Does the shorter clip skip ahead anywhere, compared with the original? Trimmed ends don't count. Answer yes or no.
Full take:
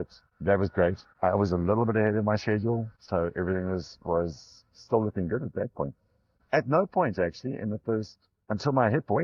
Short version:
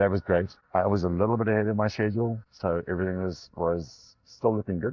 no